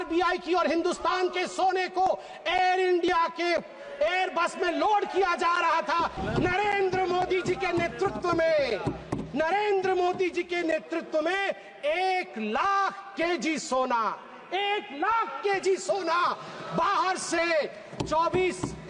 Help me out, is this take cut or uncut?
cut